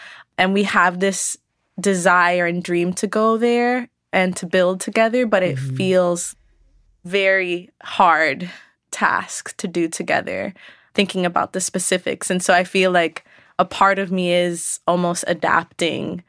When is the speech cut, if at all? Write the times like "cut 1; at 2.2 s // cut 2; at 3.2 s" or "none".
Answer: none